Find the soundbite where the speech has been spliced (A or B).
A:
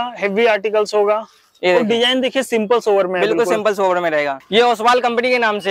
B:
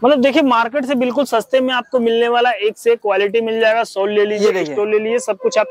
A